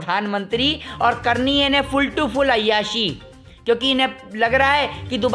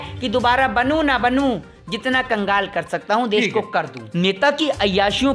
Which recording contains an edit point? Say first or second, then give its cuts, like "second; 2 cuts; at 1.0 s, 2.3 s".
second; 1 cut; at 4.0 s